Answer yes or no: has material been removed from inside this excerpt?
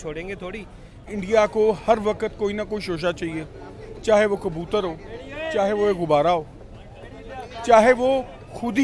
yes